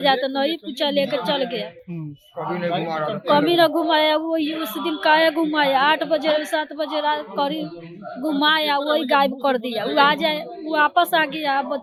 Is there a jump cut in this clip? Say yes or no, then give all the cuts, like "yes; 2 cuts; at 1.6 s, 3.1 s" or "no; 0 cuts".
no; 0 cuts